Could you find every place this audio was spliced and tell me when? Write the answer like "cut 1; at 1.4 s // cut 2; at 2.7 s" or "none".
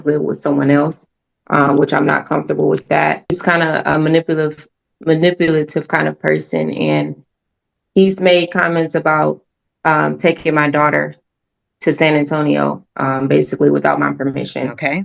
cut 1; at 3.3 s